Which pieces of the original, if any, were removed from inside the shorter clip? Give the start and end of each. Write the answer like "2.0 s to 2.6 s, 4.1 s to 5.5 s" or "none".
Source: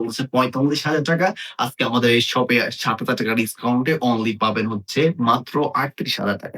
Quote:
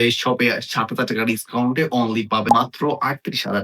4.5 s to 5.2 s